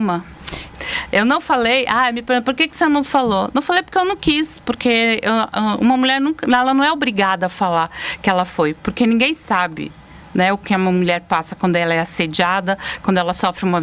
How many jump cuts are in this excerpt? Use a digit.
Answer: 0